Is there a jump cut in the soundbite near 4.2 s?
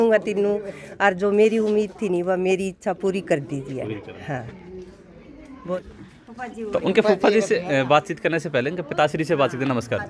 no; 0 cuts

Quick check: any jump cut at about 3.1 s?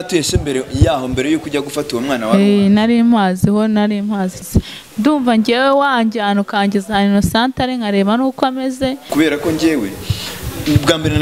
no; 2 cuts; at 4.4 s, 9.1 s

